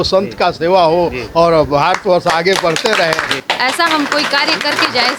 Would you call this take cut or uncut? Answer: cut